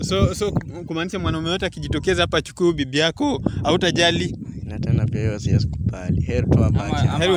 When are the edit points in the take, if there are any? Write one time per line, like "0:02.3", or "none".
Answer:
none